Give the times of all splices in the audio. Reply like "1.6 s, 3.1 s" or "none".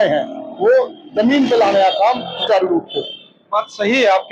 none